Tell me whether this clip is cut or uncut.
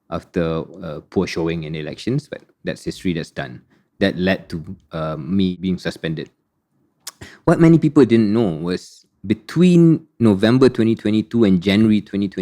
cut